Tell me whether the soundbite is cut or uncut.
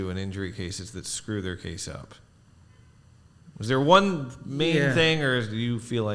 uncut